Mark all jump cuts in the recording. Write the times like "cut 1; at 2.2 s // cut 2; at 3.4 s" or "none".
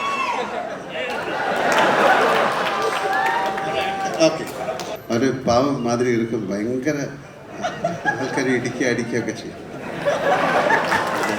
cut 1; at 4.9 s

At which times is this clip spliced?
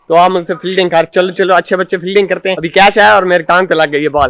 cut 1; at 2.6 s

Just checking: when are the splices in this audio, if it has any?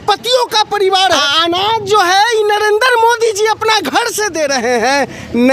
cut 1; at 1.2 s

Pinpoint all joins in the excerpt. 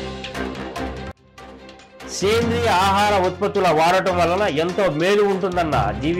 none

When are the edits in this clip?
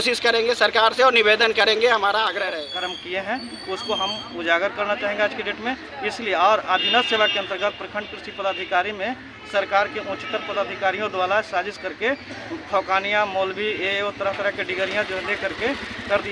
cut 1; at 2.5 s

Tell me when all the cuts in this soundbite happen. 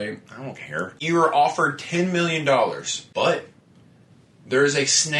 cut 1; at 1.0 s // cut 2; at 2.9 s

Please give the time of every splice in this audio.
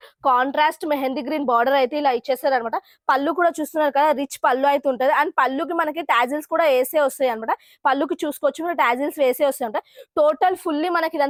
none

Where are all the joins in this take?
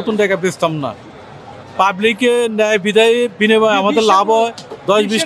none

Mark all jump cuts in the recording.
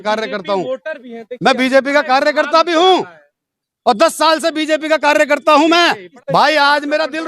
cut 1; at 6.1 s

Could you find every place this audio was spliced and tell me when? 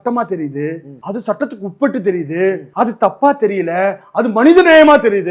cut 1; at 0.9 s // cut 2; at 2.7 s

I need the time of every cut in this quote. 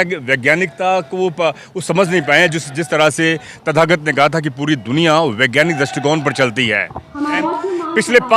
cut 1; at 7.3 s

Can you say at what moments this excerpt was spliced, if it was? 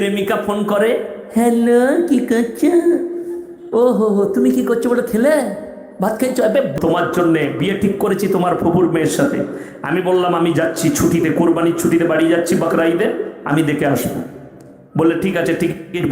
cut 1; at 6.8 s

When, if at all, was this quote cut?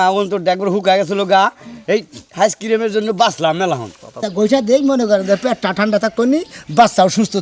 cut 1; at 4.2 s

